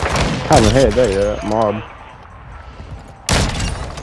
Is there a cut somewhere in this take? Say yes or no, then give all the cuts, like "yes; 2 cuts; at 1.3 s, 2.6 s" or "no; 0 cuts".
no; 0 cuts